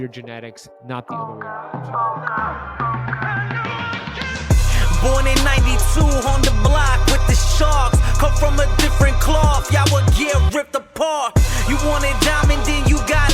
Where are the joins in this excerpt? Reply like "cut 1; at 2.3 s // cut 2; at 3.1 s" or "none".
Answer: cut 1; at 1.1 s